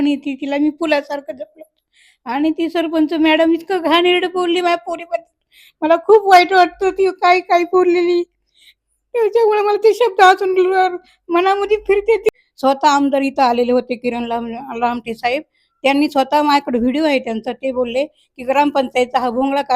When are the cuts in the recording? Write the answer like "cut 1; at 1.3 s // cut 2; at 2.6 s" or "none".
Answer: cut 1; at 12.3 s